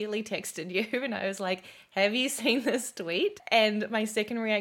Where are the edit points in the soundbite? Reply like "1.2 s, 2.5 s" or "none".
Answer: 3.4 s